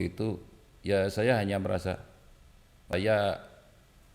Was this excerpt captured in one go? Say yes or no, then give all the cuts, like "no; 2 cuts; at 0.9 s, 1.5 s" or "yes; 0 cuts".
no; 1 cut; at 2.9 s